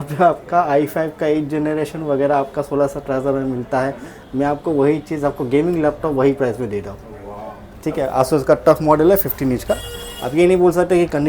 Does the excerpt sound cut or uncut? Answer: uncut